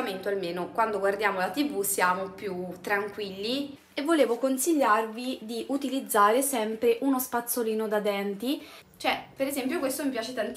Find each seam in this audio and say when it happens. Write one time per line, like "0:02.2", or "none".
0:03.8
0:08.6